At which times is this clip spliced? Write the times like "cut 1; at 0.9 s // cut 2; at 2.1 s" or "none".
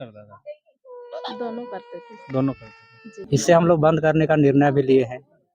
cut 1; at 3.3 s